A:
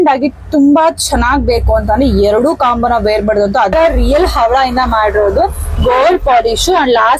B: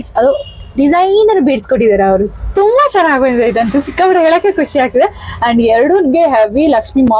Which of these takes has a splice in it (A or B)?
A